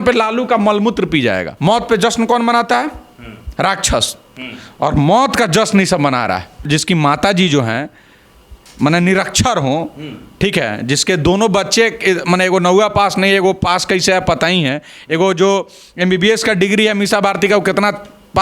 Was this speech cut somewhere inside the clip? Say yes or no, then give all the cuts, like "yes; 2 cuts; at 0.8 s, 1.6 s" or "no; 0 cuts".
yes; 2 cuts; at 1.5 s, 6.6 s